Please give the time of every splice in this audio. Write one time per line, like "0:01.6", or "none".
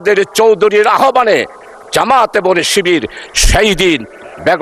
none